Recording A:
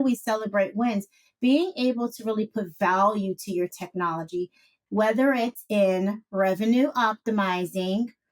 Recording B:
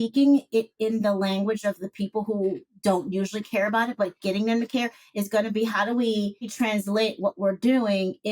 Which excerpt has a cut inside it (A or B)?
B